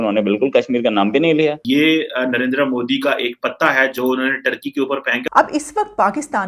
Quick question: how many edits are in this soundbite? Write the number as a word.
two